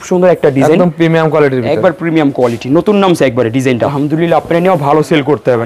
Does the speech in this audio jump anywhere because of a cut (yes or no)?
yes